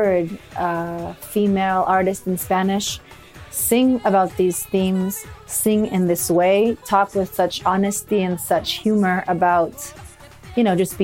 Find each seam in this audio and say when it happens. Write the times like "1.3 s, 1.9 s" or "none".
none